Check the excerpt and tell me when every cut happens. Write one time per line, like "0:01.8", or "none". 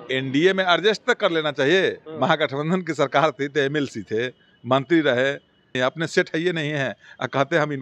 0:05.7